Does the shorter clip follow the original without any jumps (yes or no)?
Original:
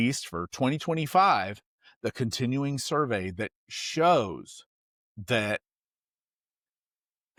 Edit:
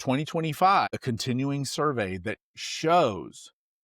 no